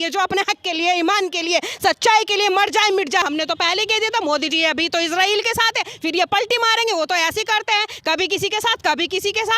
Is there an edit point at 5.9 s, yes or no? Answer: no